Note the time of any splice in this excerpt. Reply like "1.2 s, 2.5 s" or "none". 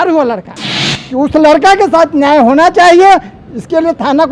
1.0 s